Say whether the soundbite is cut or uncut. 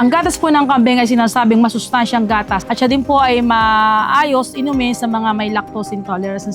cut